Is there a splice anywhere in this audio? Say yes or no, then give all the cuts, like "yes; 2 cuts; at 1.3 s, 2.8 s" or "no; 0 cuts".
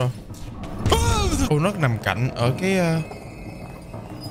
yes; 1 cut; at 1.5 s